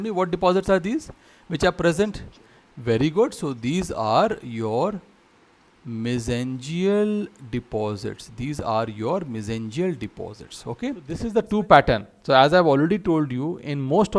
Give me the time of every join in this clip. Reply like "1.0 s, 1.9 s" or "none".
11.2 s